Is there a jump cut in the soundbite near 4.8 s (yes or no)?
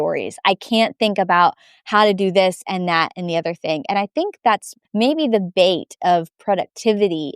yes